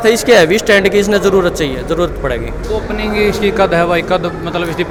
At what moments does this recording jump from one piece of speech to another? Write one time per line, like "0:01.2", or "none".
none